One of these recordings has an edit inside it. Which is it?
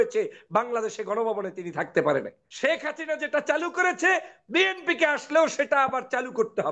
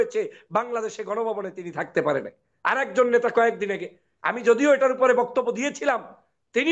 first; 1 cut; at 2.4 s

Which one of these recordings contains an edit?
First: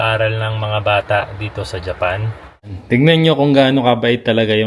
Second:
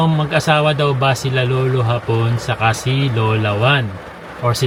first; 1 cut; at 2.7 s

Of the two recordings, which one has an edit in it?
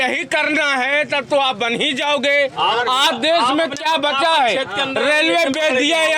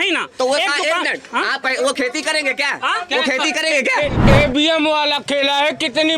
second; 1 cut; at 4.2 s

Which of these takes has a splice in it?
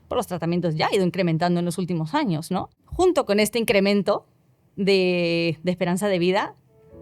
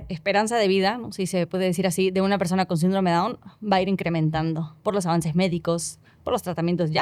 first; 1 cut; at 2.8 s

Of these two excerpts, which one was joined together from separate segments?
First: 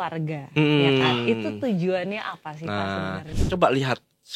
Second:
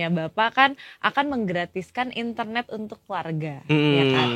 first; 1 cut; at 3.3 s

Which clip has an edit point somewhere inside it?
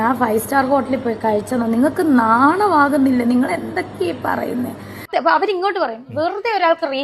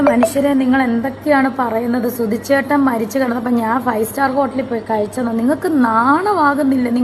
first; 1 cut; at 4.9 s

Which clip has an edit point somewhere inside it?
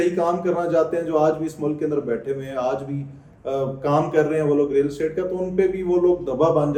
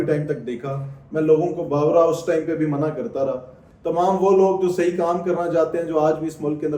second; 1 cut; at 3.6 s

